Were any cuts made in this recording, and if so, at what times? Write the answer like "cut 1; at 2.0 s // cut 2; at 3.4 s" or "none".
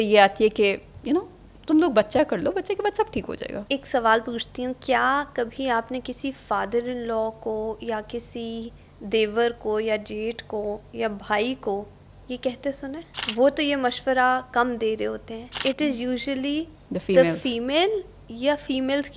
cut 1; at 3.6 s // cut 2; at 13.1 s // cut 3; at 15.6 s